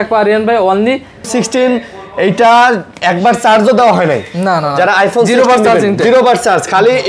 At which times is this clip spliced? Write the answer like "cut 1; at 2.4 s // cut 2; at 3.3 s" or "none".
cut 1; at 1.3 s